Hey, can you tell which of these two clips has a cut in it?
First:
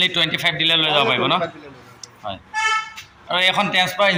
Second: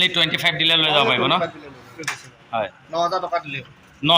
second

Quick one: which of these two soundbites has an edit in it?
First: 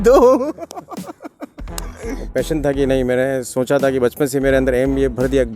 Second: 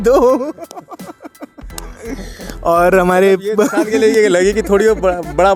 first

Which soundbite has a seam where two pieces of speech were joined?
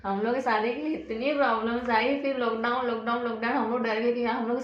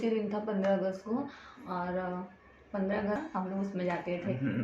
second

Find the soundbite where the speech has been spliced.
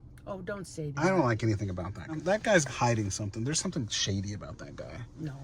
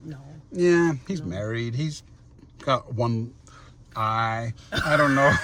first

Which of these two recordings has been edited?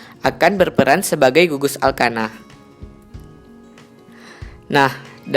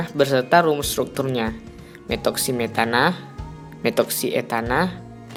first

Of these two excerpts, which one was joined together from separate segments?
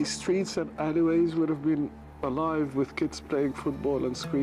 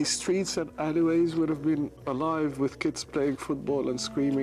second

